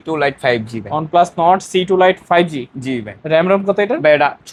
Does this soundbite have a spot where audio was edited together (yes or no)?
no